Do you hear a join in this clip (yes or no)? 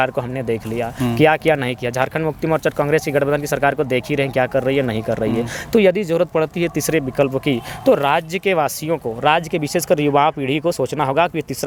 no